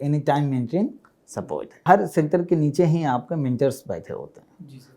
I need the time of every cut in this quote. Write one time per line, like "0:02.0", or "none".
0:01.8